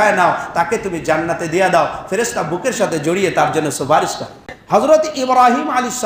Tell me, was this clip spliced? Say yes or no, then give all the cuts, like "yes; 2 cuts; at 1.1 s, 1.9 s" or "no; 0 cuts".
yes; 1 cut; at 4.5 s